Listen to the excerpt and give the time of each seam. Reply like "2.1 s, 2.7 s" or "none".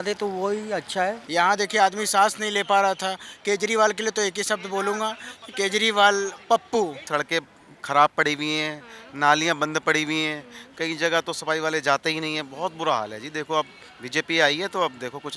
1.2 s, 7.0 s